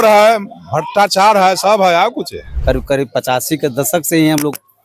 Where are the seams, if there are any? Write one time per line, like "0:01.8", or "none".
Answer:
0:02.5